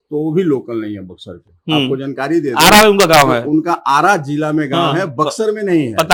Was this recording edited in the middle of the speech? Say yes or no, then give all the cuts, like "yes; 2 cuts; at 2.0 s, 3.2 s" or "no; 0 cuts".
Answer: no; 0 cuts